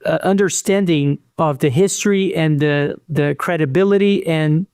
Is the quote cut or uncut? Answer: uncut